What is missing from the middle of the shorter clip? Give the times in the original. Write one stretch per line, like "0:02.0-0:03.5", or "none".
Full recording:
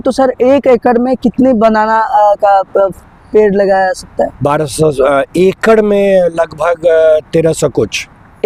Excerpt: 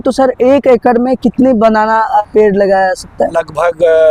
0:02.2-0:03.2
0:04.3-0:06.3